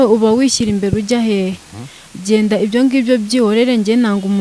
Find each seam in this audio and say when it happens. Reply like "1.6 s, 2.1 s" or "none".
none